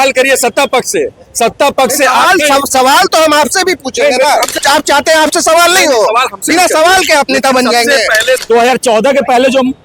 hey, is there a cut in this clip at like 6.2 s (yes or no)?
no